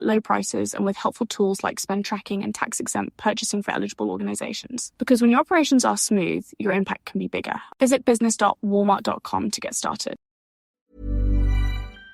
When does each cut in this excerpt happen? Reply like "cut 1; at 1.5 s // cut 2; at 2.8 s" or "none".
cut 1; at 10.7 s